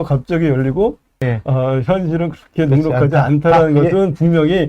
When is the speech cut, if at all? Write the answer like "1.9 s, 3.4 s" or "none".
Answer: 1.1 s

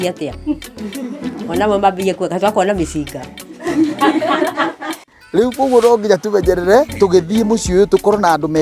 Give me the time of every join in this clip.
none

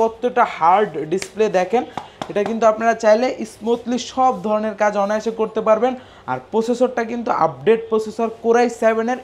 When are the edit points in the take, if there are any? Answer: none

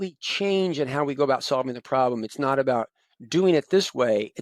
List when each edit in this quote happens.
none

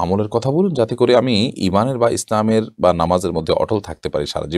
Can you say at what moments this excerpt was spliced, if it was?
none

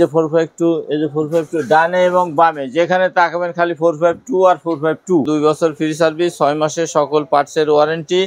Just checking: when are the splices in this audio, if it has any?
5.3 s

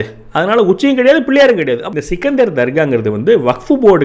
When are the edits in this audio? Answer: 1.8 s

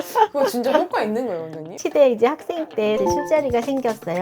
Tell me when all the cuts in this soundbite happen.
1.7 s, 3.0 s

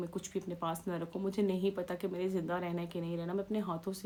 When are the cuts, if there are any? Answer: none

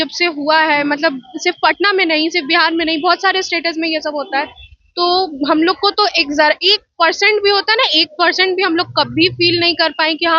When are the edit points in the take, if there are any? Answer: none

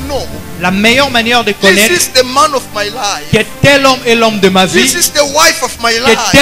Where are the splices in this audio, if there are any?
none

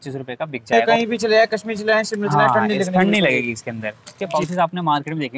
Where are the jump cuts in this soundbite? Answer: 0.8 s, 4.1 s

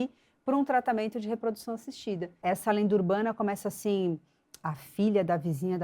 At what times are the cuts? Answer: 2.4 s

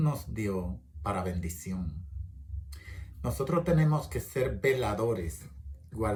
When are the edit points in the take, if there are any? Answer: none

